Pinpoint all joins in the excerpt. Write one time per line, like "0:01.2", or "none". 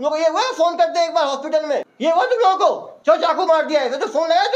0:01.9
0:02.9